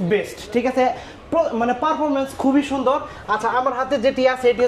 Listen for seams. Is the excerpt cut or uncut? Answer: uncut